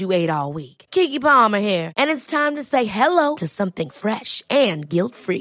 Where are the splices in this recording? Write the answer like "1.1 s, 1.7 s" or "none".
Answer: none